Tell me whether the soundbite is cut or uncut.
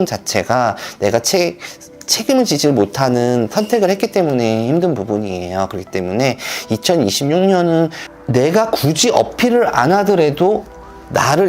cut